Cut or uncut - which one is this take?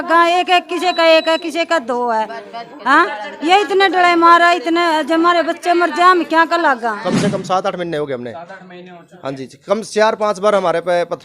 cut